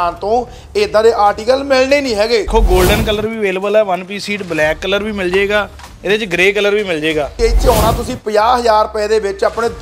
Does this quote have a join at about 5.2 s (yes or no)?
no